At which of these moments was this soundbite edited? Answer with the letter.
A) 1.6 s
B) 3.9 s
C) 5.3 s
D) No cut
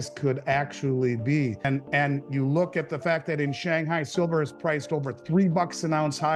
A